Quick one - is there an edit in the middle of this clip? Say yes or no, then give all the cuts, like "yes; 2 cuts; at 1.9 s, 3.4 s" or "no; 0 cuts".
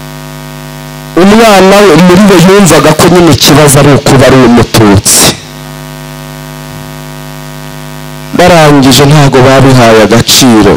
yes; 1 cut; at 1.1 s